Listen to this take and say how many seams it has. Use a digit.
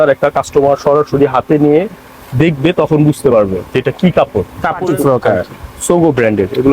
1